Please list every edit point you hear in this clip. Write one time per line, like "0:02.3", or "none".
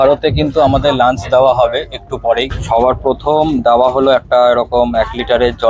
0:02.6